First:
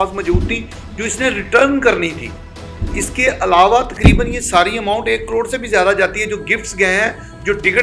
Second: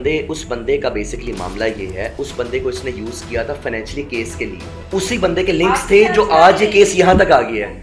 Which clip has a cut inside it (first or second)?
second